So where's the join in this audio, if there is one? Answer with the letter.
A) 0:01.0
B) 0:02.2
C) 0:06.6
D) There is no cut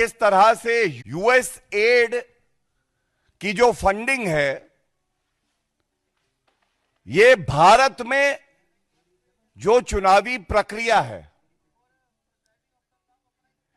A